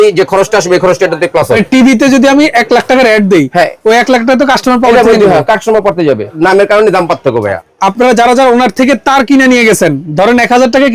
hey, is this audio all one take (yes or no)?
no